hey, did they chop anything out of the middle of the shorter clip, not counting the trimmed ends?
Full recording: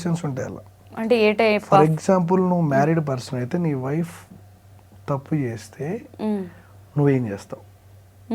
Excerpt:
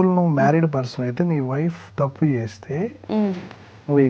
yes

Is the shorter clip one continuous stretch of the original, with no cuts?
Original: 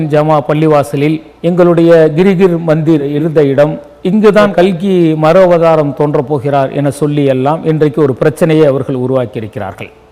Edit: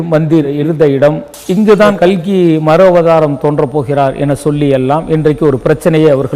yes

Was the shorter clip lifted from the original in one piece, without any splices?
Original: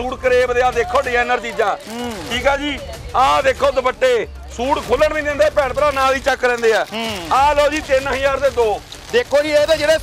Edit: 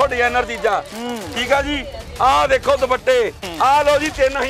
no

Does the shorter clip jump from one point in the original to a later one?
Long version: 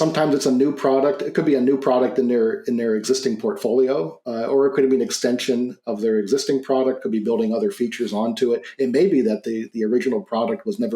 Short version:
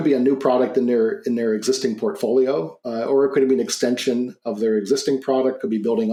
no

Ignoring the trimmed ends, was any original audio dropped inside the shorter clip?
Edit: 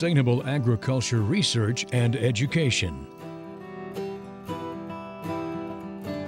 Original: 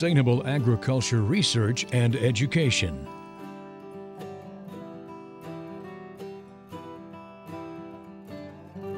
yes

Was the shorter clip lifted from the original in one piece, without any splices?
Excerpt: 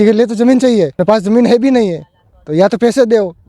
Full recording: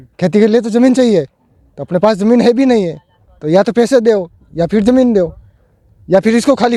no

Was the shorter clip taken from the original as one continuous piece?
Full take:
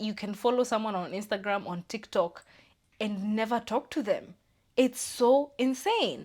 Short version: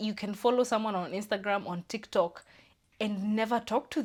yes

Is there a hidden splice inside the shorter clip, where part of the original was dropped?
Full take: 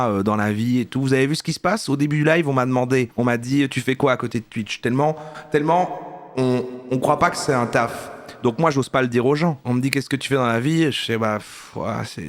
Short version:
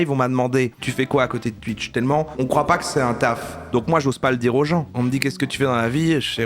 yes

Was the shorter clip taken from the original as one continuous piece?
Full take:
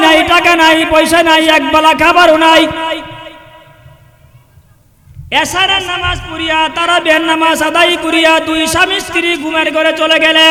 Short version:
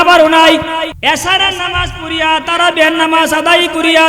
no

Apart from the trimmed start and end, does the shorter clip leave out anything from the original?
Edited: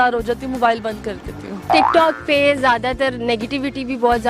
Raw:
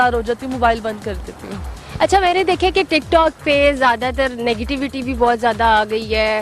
yes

